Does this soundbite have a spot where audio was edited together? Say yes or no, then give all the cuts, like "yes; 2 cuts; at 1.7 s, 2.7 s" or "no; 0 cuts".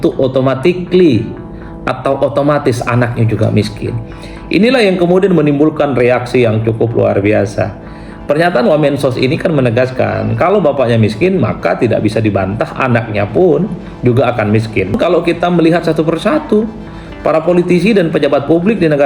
yes; 1 cut; at 14.9 s